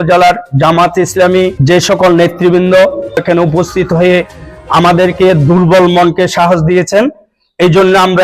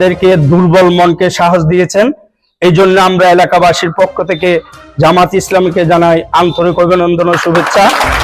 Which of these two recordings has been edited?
first; 2 cuts; at 1.6 s, 3.2 s

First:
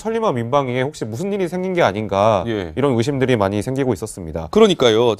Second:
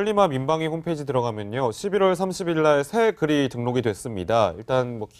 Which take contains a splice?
second; 1 cut; at 3.2 s

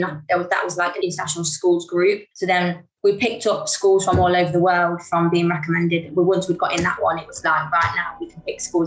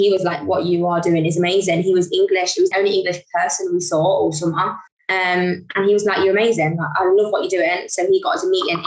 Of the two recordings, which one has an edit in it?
second; 1 cut; at 2.7 s

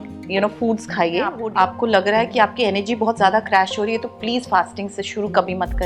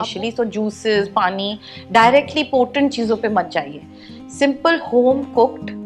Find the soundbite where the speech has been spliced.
first; 1 cut; at 1.4 s

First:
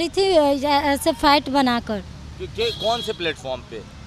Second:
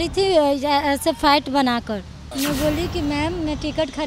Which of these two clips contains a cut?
second; 1 cut; at 2.2 s

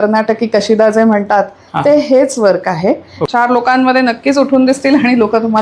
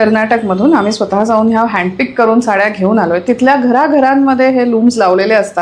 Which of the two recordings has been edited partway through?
first; 1 cut; at 3.1 s

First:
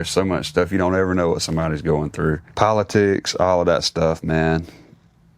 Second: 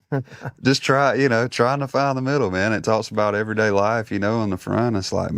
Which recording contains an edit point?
first; 1 cut; at 2.5 s

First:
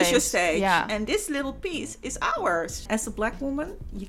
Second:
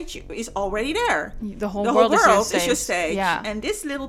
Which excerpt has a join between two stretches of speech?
first; 1 cut; at 2.9 s

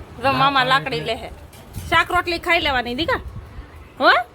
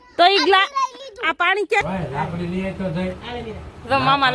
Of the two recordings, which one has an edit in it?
second; 1 cut; at 1.8 s

